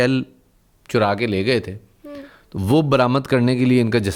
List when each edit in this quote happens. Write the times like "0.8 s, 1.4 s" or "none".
none